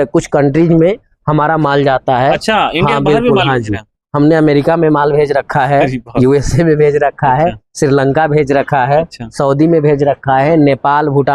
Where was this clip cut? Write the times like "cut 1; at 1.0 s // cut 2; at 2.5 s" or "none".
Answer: none